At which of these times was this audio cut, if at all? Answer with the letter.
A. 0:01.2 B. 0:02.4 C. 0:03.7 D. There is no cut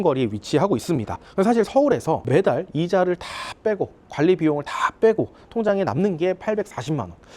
A